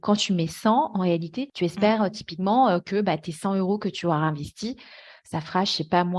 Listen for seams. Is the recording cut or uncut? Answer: cut